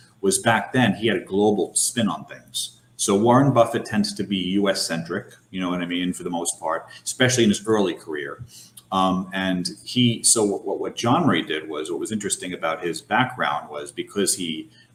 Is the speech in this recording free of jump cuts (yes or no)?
yes